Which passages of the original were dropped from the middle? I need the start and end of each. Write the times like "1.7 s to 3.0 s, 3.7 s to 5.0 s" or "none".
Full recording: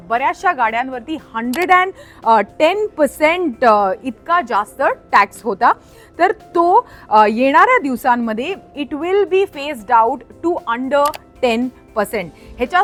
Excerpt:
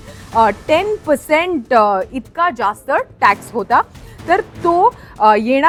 none